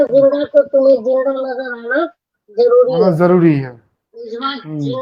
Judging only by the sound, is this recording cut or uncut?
uncut